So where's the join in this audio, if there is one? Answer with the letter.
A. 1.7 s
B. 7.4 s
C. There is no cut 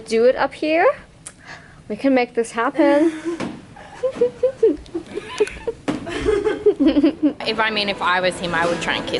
B